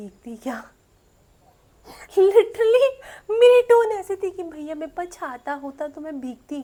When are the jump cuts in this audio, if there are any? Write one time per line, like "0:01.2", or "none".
none